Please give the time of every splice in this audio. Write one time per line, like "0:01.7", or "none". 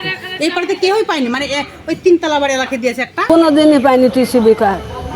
0:03.1